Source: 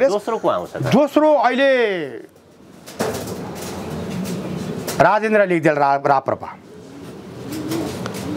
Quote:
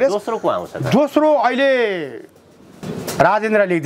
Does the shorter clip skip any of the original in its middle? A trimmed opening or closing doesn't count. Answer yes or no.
yes